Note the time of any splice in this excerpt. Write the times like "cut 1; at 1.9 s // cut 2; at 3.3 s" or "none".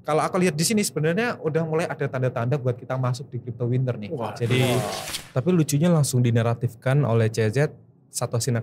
cut 1; at 5.1 s